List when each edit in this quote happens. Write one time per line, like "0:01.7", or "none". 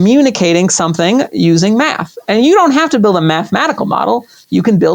none